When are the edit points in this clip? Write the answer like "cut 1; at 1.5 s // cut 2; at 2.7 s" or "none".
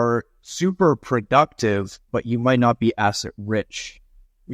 none

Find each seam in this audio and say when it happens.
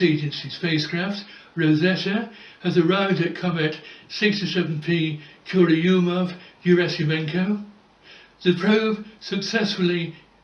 none

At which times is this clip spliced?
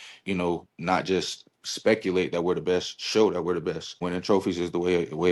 cut 1; at 3.9 s

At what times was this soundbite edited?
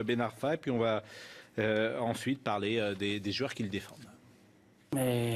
none

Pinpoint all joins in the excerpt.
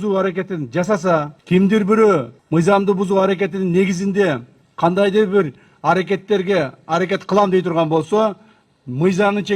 cut 1; at 1.3 s // cut 2; at 2.3 s

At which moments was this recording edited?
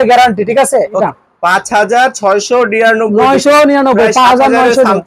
cut 1; at 1.0 s

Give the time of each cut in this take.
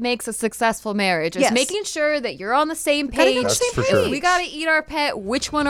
none

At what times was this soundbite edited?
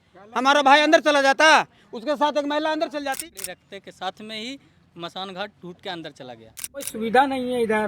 cut 1; at 3.2 s // cut 2; at 6.9 s

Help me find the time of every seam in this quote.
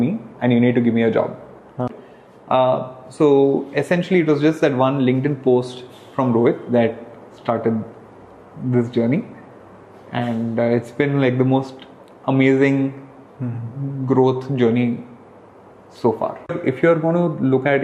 cut 1; at 2.0 s // cut 2; at 16.6 s

